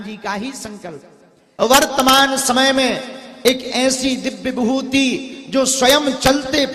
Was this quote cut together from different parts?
yes; 1 cut; at 1.4 s

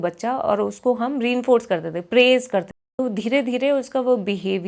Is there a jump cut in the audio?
yes; 1 cut; at 2.8 s

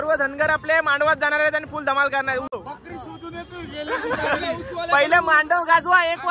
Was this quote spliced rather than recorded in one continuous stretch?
yes; 1 cut; at 2.6 s

